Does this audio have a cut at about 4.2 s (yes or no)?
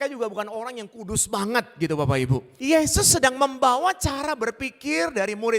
no